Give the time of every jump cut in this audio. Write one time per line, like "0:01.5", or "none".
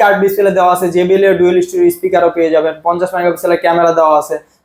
none